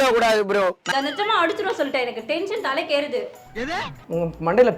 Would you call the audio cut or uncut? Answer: uncut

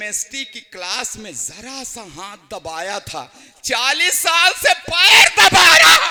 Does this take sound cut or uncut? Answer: uncut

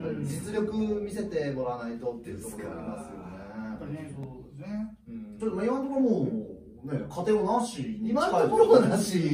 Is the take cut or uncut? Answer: uncut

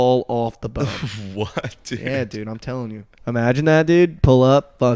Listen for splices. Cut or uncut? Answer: cut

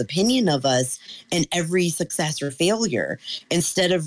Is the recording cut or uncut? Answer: uncut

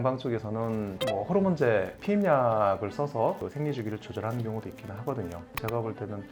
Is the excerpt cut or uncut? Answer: uncut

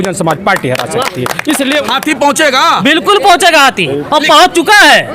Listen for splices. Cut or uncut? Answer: cut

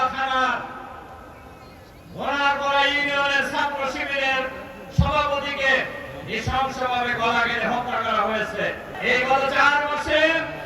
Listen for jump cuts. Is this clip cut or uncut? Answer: cut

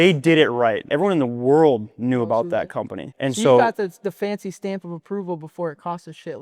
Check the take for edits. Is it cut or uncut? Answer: cut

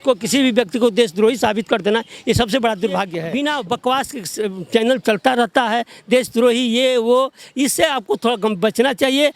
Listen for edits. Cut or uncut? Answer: cut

